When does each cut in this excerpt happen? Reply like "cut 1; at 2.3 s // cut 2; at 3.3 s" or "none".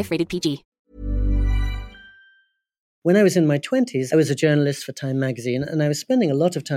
cut 1; at 2.8 s // cut 2; at 4.0 s